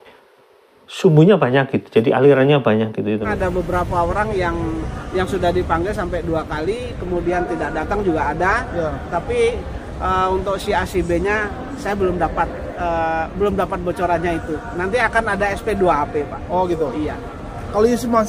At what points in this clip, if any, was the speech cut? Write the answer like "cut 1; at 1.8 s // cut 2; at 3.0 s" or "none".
cut 1; at 3.3 s